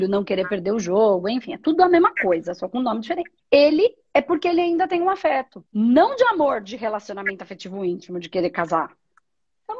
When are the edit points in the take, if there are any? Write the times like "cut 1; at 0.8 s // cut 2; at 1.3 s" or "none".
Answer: cut 1; at 3.3 s // cut 2; at 5.6 s

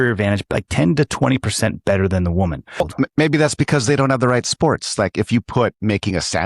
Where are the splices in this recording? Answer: cut 1; at 2.8 s

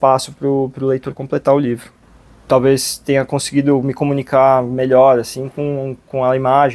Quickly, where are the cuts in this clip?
cut 1; at 2.4 s

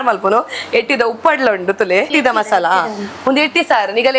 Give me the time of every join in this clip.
cut 1; at 2.1 s

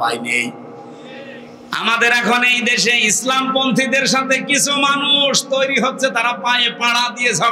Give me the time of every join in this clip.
none

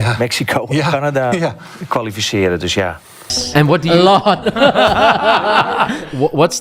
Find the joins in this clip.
cut 1; at 3.3 s

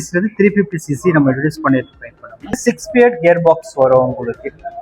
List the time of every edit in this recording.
cut 1; at 2.6 s

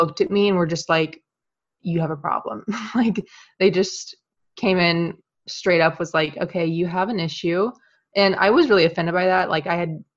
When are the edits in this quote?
none

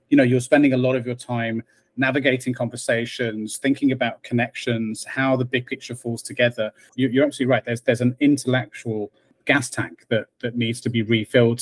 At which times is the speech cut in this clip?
cut 1; at 6.9 s // cut 2; at 9.3 s

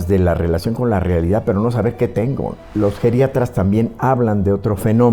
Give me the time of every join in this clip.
cut 1; at 2.6 s

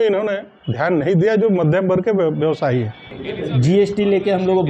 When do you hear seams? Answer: cut 1; at 3.3 s

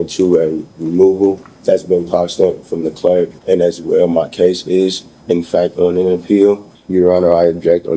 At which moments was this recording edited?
cut 1; at 1.5 s // cut 2; at 3.4 s // cut 3; at 6.7 s

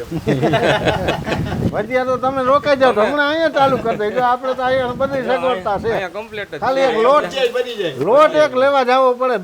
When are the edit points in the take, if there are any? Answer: none

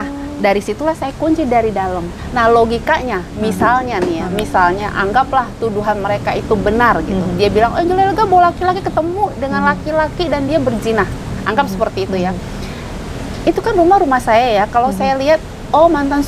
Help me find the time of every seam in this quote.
none

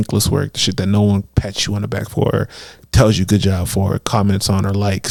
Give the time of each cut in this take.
none

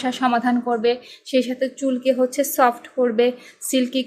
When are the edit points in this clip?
none

